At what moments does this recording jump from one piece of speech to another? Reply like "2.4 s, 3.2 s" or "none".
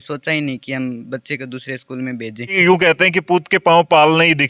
2.6 s

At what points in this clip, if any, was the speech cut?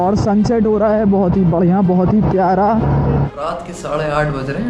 3.3 s

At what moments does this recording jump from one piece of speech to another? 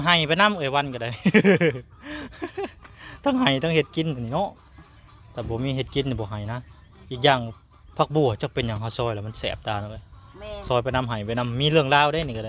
none

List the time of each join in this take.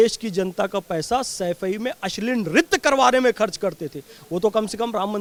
none

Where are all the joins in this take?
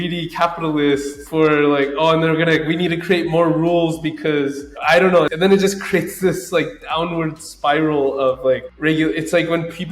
1.2 s, 4.7 s

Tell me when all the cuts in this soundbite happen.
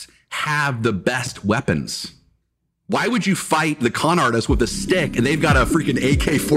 none

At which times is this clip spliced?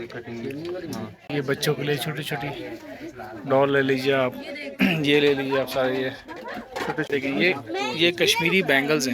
1.3 s, 7.1 s

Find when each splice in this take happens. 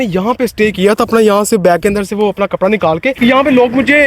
3.1 s

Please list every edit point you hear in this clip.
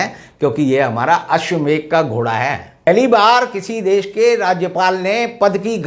2.9 s

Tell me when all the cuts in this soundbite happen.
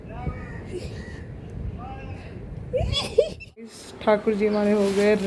3.7 s

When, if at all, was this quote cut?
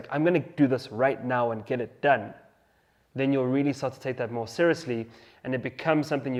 none

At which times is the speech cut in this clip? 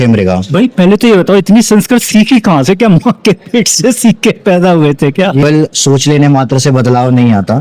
5.4 s

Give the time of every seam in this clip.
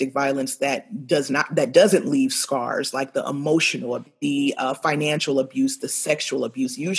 4.1 s

